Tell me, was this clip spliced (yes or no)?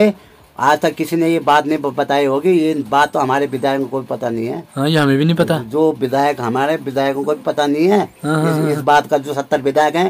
no